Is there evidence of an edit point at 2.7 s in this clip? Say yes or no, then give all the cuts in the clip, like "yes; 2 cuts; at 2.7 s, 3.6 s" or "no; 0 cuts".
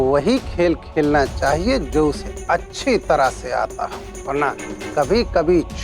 no; 1 cut; at 4.1 s